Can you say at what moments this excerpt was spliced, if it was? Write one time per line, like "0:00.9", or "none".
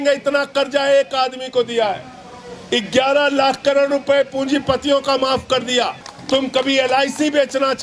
0:06.1